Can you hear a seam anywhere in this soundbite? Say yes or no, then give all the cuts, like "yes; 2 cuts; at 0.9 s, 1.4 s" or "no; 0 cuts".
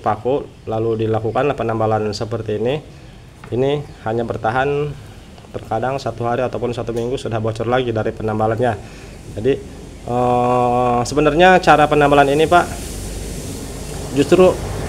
no; 0 cuts